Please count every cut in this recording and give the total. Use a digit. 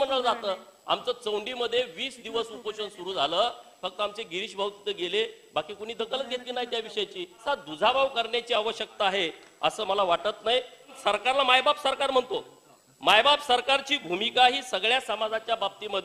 2